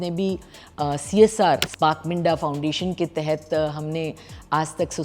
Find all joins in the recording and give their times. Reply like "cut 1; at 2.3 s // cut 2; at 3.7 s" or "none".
cut 1; at 1.7 s